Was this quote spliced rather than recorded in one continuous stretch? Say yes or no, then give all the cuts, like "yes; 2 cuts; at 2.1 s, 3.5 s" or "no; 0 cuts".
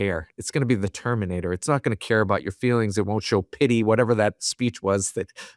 no; 0 cuts